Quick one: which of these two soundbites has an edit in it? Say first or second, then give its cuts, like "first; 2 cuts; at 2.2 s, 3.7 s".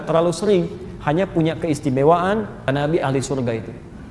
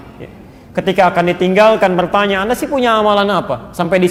first; 1 cut; at 2.7 s